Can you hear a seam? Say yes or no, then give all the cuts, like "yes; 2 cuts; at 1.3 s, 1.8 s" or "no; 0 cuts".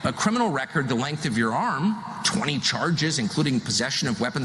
no; 0 cuts